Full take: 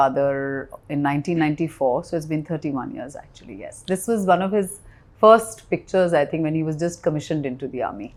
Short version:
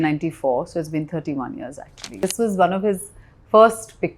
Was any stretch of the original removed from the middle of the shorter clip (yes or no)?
yes